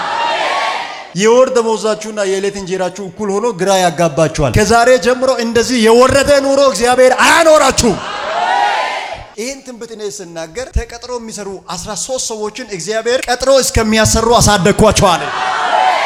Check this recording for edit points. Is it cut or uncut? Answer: uncut